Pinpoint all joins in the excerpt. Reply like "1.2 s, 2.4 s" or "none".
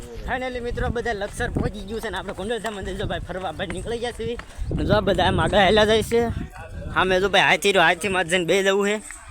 none